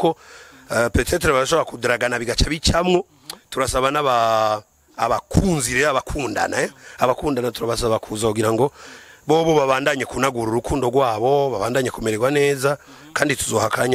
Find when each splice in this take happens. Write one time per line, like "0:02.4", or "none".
none